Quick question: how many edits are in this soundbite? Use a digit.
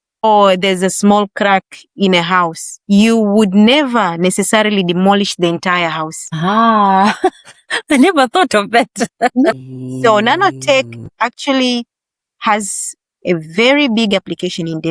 1